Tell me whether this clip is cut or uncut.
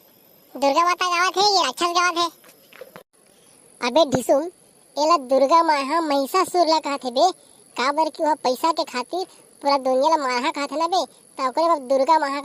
uncut